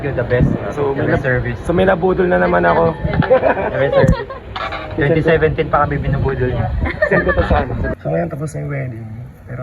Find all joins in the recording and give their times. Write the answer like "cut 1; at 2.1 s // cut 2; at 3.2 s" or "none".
cut 1; at 7.9 s

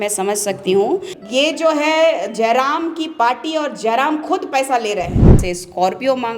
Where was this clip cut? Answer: cut 1; at 1.2 s // cut 2; at 5.4 s

